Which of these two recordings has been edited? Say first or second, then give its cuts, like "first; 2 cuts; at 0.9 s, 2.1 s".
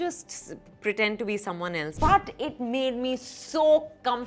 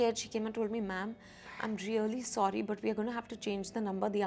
first; 1 cut; at 1.9 s